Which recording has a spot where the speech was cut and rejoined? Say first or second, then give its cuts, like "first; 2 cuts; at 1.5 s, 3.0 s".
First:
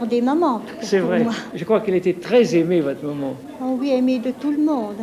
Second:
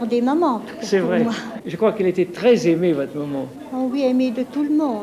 first; 1 cut; at 1.5 s